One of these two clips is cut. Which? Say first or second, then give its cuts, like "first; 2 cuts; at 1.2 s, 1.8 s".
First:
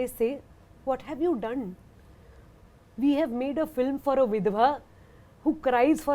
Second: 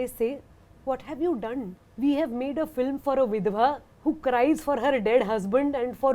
second; 2 cuts; at 1.8 s, 3.9 s